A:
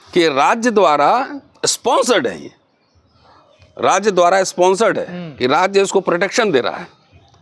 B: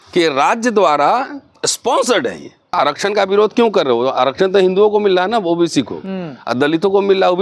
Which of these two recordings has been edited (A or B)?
B